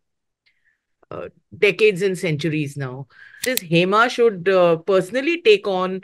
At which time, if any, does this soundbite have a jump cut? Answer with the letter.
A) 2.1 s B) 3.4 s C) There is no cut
B